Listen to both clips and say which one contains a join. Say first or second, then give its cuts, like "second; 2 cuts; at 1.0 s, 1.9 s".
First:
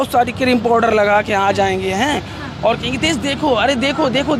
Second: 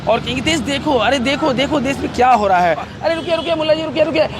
second; 1 cut; at 2.9 s